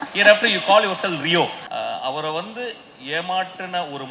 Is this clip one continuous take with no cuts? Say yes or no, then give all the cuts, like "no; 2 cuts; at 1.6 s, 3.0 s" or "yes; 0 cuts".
no; 1 cut; at 1.7 s